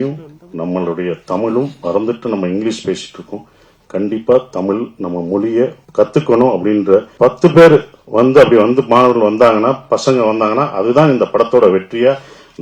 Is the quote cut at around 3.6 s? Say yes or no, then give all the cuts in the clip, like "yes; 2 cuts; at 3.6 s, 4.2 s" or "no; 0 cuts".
no; 2 cuts; at 5.8 s, 7.1 s